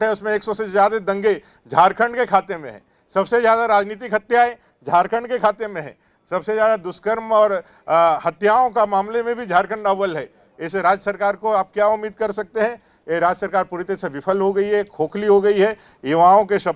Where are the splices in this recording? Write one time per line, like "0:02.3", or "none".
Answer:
none